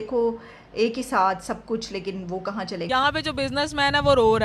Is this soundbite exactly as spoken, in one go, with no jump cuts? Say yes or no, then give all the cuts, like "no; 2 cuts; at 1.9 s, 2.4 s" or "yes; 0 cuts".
no; 1 cut; at 2.9 s